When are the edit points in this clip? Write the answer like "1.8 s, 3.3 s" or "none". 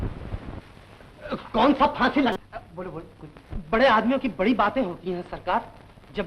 2.3 s